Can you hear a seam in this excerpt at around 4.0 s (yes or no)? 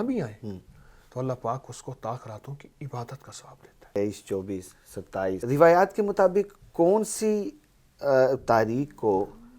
yes